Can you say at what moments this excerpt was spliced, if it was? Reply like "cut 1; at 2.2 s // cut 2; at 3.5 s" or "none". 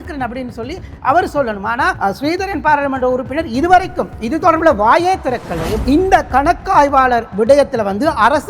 cut 1; at 5.8 s